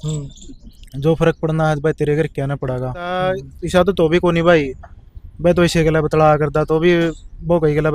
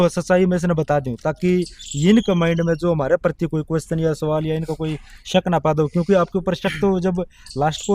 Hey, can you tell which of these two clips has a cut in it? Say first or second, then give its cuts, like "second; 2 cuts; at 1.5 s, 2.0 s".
first; 1 cut; at 3.2 s